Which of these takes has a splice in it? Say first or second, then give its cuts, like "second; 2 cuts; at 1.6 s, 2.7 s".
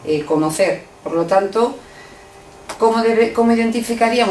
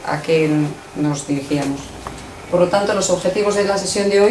second; 1 cut; at 1.7 s